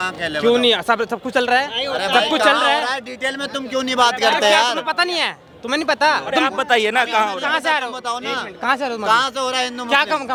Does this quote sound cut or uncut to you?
uncut